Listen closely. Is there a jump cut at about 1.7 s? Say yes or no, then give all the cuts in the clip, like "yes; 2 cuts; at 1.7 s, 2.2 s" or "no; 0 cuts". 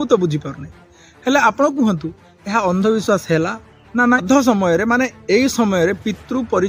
no; 1 cut; at 4.2 s